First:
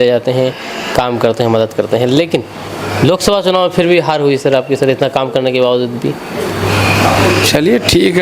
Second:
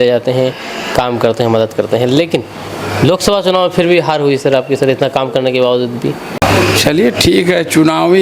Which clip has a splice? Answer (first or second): second